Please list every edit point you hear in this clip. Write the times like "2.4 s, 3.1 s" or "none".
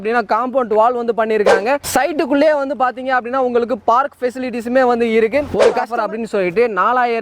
5.9 s